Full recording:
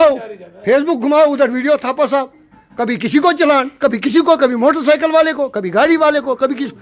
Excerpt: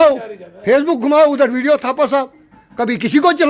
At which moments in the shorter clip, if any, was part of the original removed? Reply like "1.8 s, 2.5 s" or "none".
none